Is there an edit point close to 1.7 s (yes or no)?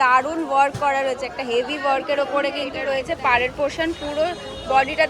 no